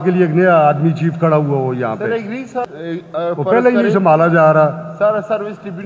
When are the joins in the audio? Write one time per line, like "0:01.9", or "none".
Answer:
0:02.7

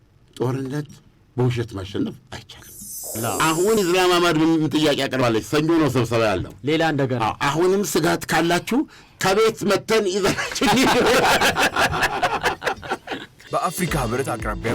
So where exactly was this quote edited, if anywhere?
0:03.2
0:13.3

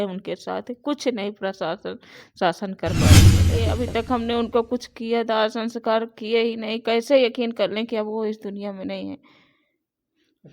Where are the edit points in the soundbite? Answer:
0:02.9
0:03.6

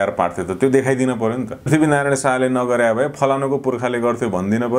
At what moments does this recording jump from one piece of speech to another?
0:01.7

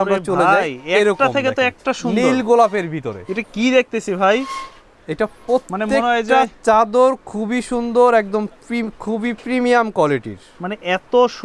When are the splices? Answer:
none

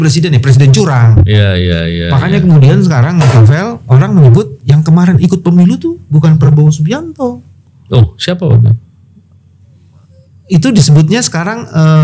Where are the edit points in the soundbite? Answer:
none

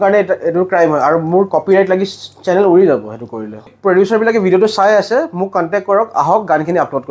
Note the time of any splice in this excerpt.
0:03.6

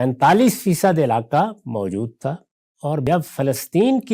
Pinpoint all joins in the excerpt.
0:03.0

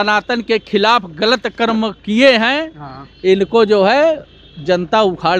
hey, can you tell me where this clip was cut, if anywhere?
none

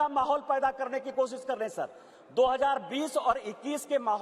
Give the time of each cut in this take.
none

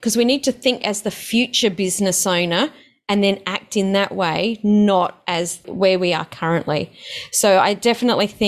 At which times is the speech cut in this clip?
none

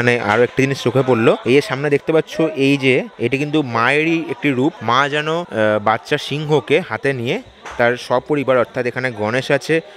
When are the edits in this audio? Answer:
0:01.4
0:03.1
0:05.1

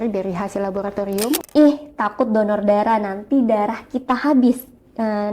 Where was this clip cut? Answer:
0:01.4

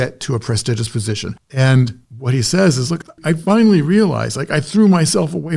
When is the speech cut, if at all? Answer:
0:01.5
0:03.2

